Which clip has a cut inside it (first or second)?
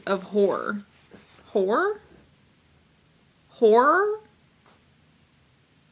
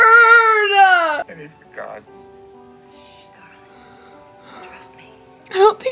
second